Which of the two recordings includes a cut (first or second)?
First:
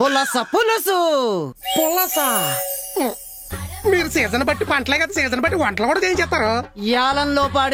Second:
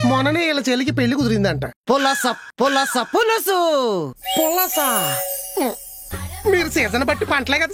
second